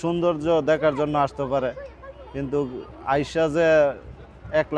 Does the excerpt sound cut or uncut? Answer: uncut